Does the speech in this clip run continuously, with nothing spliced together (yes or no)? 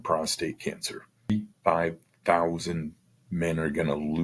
no